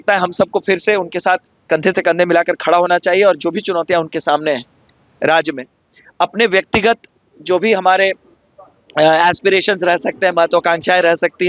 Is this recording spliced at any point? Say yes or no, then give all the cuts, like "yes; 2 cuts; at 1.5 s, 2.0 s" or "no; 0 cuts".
no; 0 cuts